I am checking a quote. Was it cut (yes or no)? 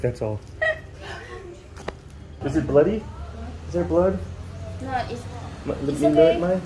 yes